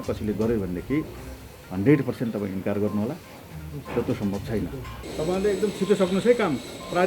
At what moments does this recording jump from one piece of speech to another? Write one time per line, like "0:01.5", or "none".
0:05.0